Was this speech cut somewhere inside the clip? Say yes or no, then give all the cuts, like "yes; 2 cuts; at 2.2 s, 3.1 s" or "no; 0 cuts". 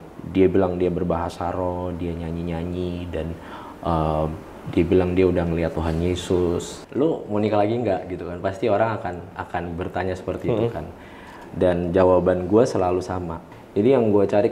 yes; 2 cuts; at 6.8 s, 13.4 s